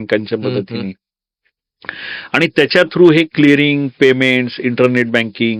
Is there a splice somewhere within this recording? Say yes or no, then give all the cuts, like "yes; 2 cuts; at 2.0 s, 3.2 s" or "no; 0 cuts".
no; 0 cuts